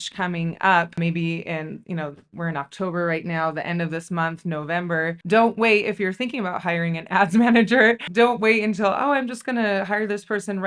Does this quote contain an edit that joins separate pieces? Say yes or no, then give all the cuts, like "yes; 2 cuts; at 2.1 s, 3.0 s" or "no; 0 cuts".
no; 0 cuts